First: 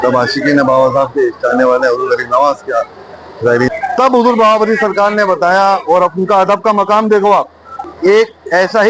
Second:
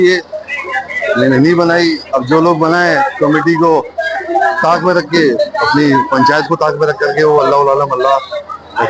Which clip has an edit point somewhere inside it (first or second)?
first